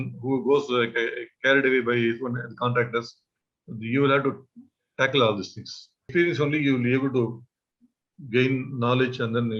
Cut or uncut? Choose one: cut